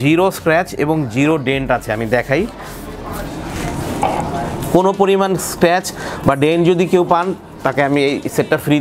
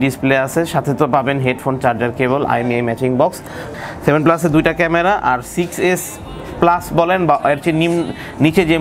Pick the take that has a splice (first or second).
second